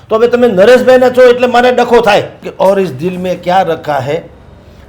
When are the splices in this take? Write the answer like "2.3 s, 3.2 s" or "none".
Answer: 2.4 s